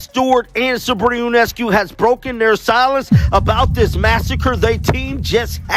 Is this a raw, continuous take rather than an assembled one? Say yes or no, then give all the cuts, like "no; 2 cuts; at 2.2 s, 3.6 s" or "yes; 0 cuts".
yes; 0 cuts